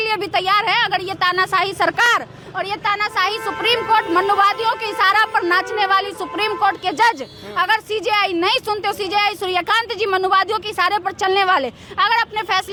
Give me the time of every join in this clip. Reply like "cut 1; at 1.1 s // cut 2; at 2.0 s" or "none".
none